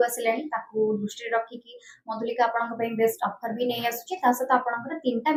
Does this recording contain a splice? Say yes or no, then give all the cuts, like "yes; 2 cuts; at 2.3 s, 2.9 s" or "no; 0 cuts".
no; 0 cuts